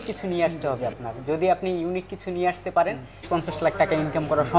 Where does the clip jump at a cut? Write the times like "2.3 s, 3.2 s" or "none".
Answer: 3.2 s